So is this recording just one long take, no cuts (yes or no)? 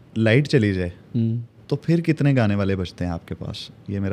no